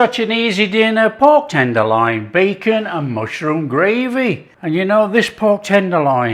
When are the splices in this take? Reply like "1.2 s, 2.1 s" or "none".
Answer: 4.5 s